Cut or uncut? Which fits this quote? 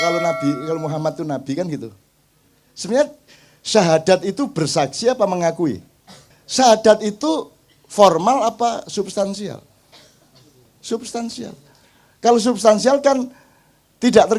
cut